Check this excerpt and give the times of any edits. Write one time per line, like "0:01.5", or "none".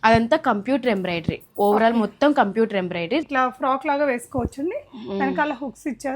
0:03.2

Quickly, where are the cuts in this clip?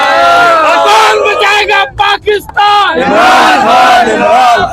none

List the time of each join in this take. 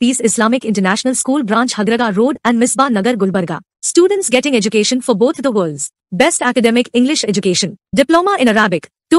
none

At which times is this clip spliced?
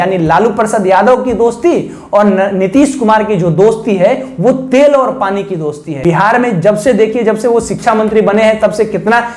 0:05.9

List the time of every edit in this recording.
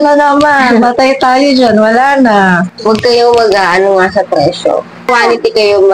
0:02.7
0:05.1

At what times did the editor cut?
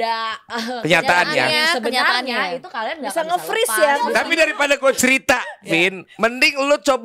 0:04.1

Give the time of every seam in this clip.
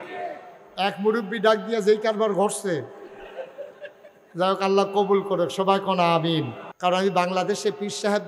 0:06.6

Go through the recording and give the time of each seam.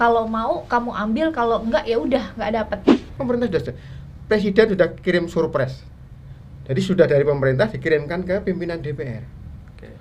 0:03.0

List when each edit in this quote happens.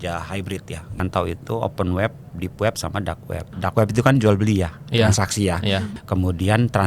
0:01.0
0:03.5
0:05.9

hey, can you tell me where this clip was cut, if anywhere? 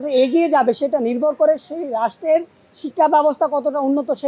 none

